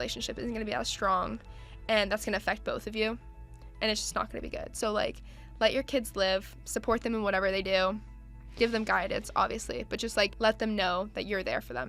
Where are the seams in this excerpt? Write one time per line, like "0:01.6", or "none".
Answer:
0:10.3